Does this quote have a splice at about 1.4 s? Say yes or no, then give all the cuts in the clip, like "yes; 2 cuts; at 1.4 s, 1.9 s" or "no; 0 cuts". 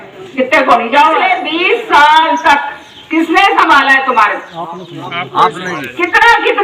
yes; 1 cut; at 1.4 s